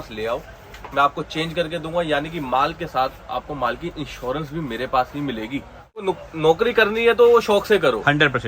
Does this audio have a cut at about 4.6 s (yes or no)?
no